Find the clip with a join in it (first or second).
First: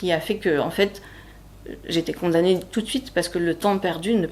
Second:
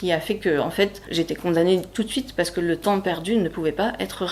second